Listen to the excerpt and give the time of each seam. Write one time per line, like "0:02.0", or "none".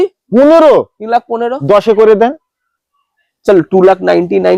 none